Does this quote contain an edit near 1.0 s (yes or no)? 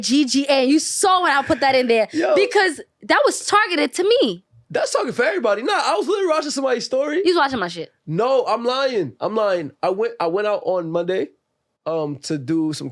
no